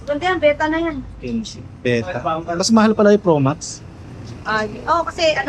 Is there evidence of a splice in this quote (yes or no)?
no